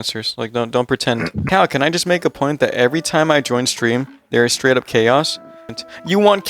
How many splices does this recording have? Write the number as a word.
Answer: two